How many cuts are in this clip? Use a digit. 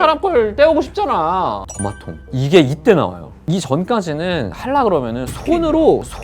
1